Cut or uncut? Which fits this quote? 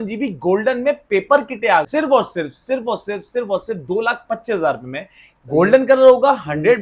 cut